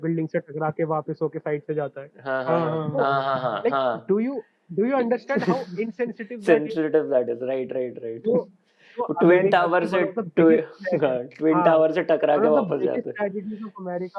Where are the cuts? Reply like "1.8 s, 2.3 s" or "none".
none